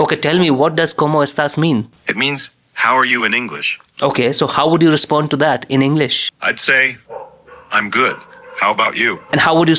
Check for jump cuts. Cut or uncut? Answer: cut